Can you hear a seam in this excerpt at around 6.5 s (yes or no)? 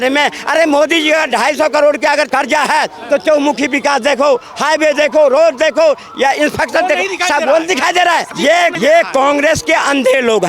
no